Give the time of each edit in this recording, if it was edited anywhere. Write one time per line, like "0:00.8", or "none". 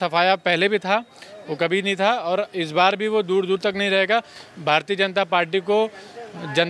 none